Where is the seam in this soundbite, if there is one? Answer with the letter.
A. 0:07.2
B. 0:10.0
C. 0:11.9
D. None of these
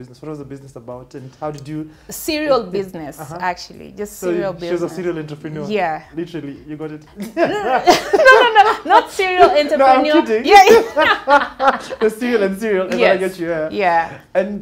D